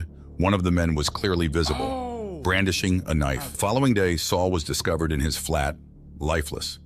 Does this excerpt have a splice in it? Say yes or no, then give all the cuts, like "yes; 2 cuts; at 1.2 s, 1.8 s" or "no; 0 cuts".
yes; 1 cut; at 3.6 s